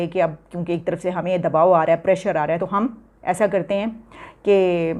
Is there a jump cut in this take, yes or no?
yes